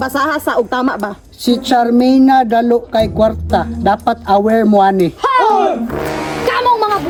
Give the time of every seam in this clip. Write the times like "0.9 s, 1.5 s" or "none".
none